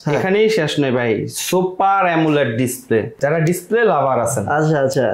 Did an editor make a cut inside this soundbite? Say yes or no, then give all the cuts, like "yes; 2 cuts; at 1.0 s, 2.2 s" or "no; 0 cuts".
yes; 1 cut; at 3.2 s